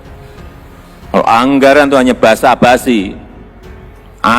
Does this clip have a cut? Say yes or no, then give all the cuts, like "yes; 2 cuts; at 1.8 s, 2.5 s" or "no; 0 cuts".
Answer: yes; 1 cut; at 1.1 s